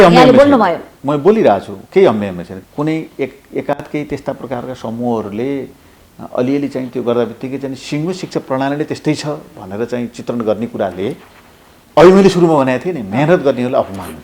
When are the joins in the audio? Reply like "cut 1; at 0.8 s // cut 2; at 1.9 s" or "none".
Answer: cut 1; at 2.5 s